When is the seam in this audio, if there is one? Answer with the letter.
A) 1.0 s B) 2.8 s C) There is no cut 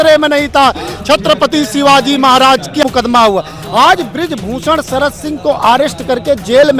B